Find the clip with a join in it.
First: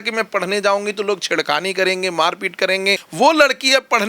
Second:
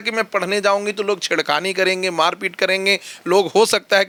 first; 1 cut; at 3.0 s

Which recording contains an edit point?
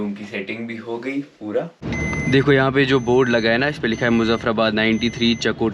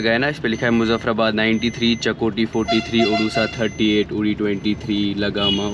first; 1 cut; at 1.8 s

